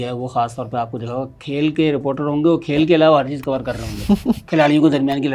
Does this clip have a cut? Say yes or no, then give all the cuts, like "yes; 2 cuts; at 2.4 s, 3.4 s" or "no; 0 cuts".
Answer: no; 0 cuts